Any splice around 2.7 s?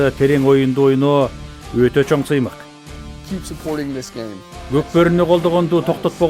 yes; 2 cuts; at 2.7 s, 4.5 s

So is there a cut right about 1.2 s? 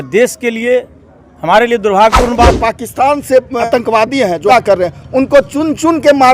no; 3 cuts; at 2.4 s, 3.6 s, 4.5 s

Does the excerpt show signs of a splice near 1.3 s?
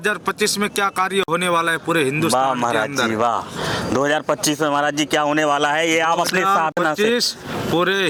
no; 0 cuts

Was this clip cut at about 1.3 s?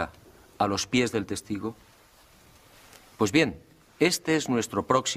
no; 1 cut; at 2.8 s

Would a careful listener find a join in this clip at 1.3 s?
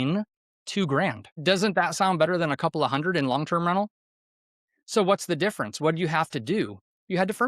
yes; 1 cut; at 1.3 s

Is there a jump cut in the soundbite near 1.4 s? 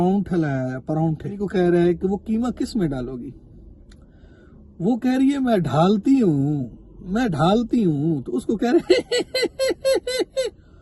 yes; 1 cut; at 1.4 s

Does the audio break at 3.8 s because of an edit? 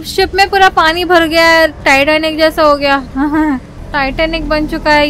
no; 0 cuts

